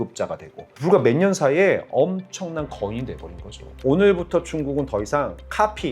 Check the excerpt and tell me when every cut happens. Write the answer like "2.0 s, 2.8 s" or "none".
3.8 s